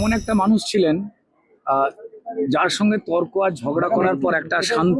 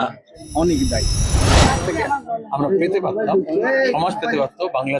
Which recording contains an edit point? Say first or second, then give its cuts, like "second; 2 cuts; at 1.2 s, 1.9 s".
second; 1 cut; at 1.4 s